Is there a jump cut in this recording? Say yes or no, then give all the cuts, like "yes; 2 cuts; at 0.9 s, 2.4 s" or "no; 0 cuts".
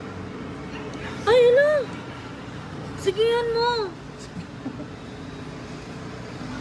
no; 0 cuts